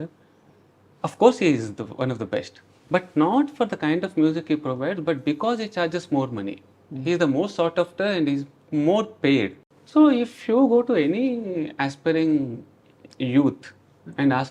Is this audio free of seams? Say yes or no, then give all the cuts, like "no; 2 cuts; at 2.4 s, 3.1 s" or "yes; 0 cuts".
no; 1 cut; at 9.7 s